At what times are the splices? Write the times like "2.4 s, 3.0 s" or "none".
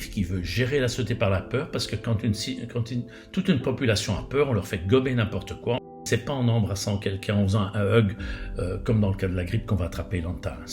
6.1 s